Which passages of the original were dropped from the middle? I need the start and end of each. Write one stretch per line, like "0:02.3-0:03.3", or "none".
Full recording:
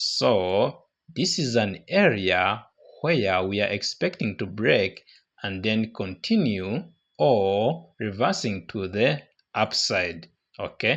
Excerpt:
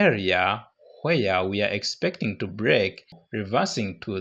0:05.2-0:07.9